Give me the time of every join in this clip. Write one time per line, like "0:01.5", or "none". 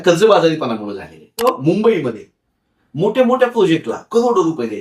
0:01.4